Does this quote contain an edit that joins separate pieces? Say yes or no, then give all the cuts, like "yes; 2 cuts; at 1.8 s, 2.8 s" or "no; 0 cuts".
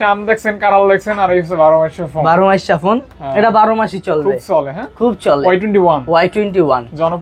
no; 0 cuts